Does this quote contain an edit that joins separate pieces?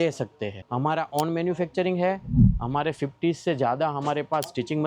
no; 0 cuts

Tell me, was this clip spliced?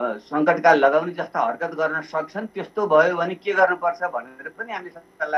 no; 0 cuts

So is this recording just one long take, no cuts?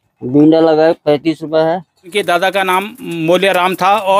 no; 1 cut; at 2.0 s

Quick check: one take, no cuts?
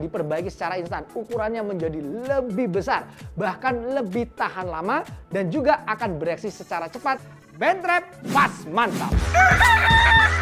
no; 1 cut; at 9.2 s

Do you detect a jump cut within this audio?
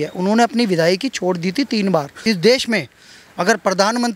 yes; 1 cut; at 2.1 s

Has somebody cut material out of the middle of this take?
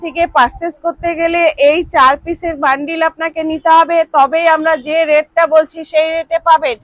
no; 0 cuts

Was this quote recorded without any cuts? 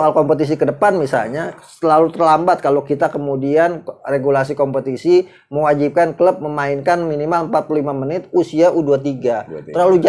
yes; 0 cuts

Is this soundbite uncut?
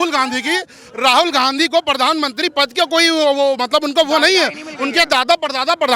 yes; 0 cuts

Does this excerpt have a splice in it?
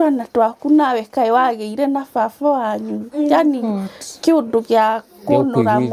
no; 0 cuts

